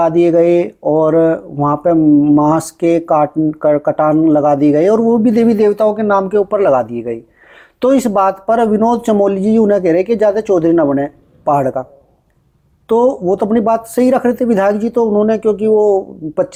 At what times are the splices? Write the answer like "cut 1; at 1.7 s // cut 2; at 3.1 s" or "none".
none